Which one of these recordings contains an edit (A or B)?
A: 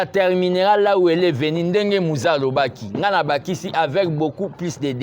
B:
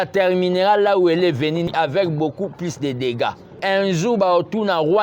B